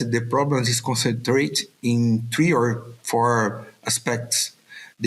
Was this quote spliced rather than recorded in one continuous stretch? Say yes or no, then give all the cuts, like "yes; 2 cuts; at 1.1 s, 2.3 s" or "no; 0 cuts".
no; 0 cuts